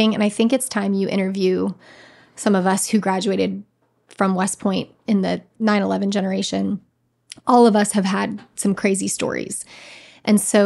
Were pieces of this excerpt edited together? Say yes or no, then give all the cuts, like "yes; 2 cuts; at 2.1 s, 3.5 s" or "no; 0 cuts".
yes; 1 cut; at 5.5 s